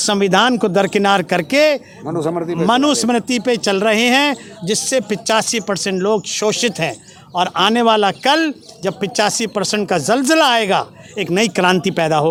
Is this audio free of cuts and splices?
yes; 0 cuts

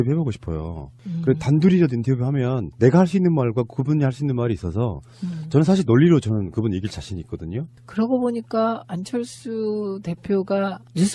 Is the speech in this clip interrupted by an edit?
no; 0 cuts

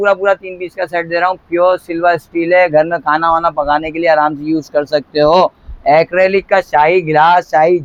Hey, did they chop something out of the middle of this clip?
no; 0 cuts

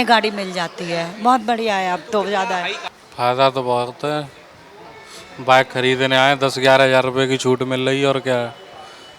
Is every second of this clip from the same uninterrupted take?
no; 1 cut; at 2.8 s

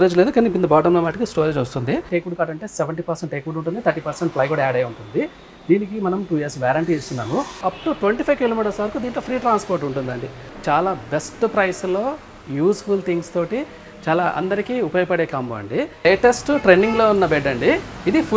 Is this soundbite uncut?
no; 4 cuts; at 2.1 s, 7.7 s, 10.5 s, 16.0 s

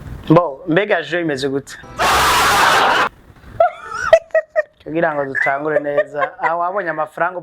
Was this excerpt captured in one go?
no; 1 cut; at 1.8 s

